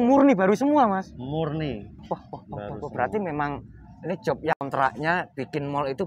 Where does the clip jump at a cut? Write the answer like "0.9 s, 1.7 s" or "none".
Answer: 4.6 s